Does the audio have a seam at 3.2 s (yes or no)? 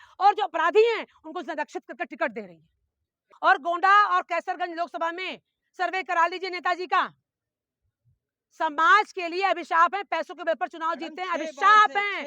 yes